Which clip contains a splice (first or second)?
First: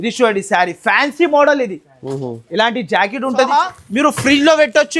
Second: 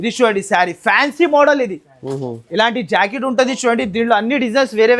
first